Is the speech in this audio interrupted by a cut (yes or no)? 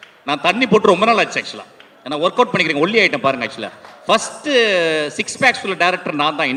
no